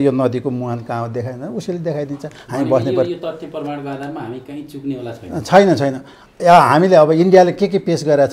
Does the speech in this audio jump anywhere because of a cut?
no; 0 cuts

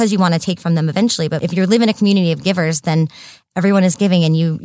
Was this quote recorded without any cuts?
no; 1 cut; at 1.4 s

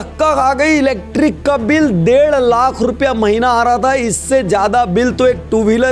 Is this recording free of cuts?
yes; 0 cuts

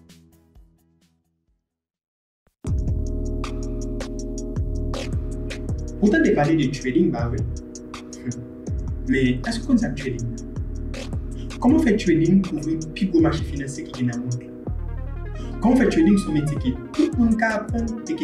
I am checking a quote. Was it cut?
yes; 1 cut; at 2.5 s

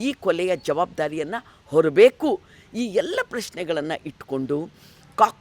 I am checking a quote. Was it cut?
no; 0 cuts

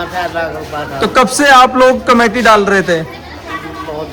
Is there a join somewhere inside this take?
no; 0 cuts

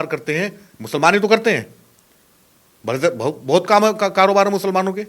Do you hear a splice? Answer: no; 0 cuts

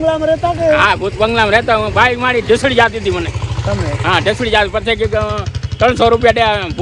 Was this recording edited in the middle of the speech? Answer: no; 0 cuts

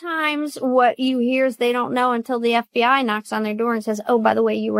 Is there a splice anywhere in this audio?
no; 0 cuts

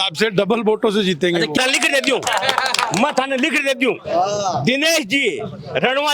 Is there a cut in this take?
yes; 1 cut; at 1.6 s

